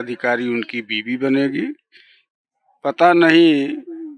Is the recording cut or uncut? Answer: uncut